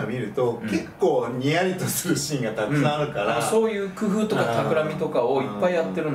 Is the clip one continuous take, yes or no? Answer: yes